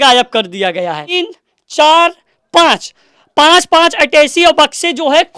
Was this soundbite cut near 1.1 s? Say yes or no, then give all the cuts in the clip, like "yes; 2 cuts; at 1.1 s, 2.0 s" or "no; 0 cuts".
yes; 1 cut; at 1.1 s